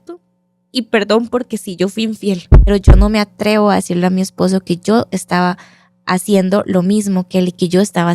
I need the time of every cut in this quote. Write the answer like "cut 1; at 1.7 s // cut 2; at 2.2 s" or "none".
cut 1; at 2.7 s